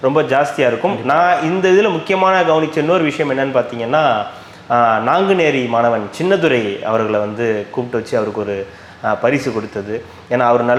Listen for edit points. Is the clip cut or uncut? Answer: uncut